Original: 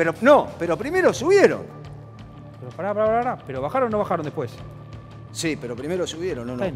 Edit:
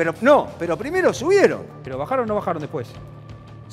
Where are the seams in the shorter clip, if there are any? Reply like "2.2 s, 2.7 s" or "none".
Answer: 1.8 s